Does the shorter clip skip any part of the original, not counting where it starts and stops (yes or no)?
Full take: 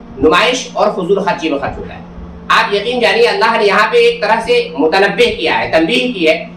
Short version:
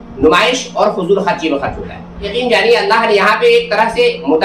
yes